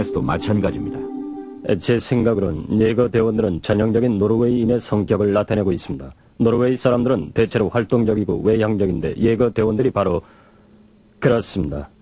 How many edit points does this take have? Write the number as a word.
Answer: one